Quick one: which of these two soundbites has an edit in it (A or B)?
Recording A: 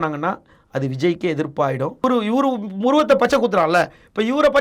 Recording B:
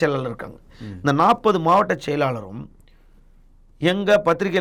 A